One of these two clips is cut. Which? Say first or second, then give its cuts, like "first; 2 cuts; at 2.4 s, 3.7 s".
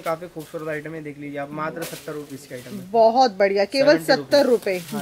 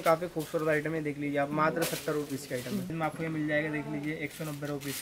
second; 1 cut; at 2.9 s